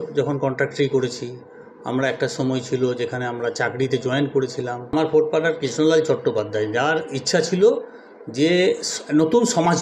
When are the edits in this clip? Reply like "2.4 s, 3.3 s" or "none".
4.9 s